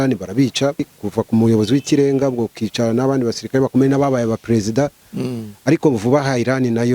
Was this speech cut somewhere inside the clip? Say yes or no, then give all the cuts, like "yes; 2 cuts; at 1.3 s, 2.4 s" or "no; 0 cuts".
yes; 1 cut; at 1.0 s